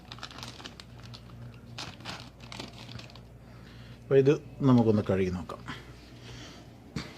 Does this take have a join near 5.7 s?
yes; 1 cut; at 5.7 s

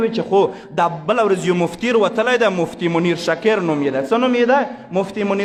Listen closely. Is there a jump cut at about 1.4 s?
no; 0 cuts

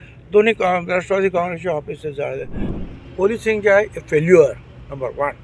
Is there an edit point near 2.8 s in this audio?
yes; 1 cut; at 2.8 s

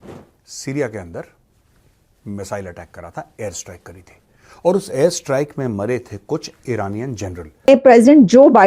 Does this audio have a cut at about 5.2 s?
no; 1 cut; at 7.7 s

